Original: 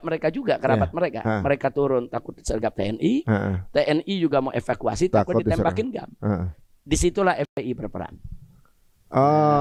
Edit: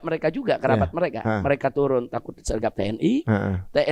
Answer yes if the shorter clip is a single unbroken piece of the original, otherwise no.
yes